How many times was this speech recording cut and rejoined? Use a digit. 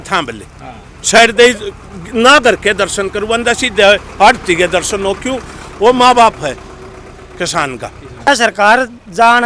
1